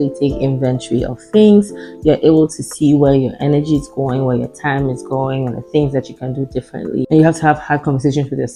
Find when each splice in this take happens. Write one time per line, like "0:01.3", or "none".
none